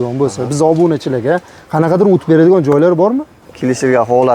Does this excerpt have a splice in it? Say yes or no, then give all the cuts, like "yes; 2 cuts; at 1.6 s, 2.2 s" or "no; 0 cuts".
yes; 1 cut; at 3.4 s